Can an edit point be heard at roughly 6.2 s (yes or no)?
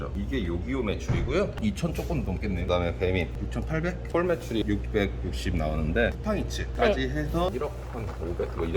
yes